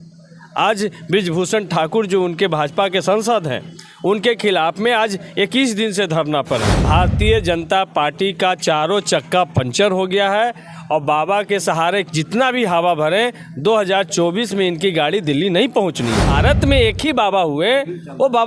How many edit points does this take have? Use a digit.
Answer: 2